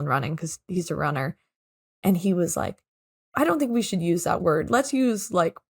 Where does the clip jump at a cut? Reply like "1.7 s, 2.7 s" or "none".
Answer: 4.4 s